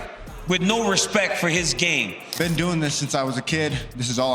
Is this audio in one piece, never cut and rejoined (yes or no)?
no